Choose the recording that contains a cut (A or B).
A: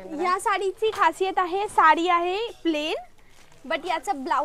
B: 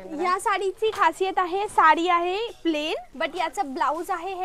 B